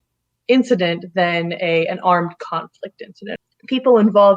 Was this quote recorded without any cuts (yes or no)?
no